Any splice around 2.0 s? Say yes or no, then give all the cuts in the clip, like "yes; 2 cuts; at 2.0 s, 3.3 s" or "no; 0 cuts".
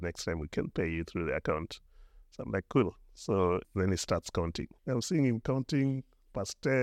no; 2 cuts; at 3.7 s, 4.7 s